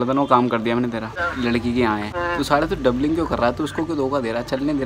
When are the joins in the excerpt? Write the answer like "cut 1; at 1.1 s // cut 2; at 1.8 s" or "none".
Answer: cut 1; at 1.2 s // cut 2; at 2.1 s